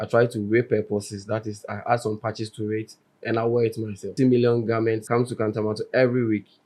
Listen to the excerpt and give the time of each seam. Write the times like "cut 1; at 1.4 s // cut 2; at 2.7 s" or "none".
cut 1; at 4.1 s // cut 2; at 5.0 s